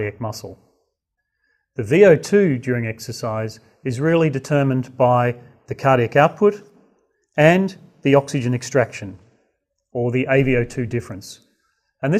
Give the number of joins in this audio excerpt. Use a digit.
1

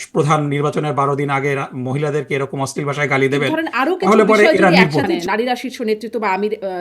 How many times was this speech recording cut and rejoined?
1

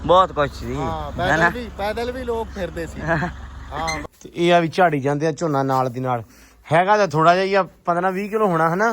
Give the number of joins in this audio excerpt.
1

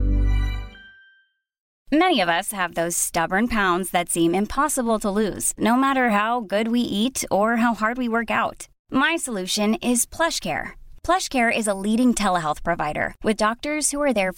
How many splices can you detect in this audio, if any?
1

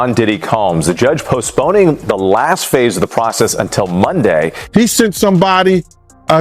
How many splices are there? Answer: 1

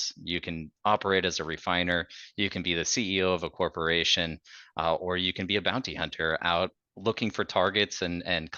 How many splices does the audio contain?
0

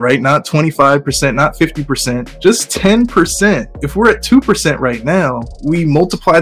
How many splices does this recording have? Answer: 3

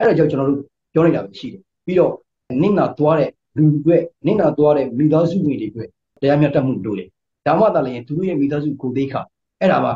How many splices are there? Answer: 3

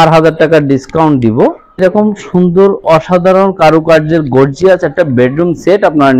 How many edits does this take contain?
1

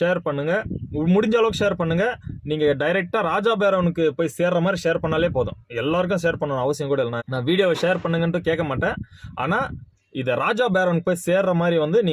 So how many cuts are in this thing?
0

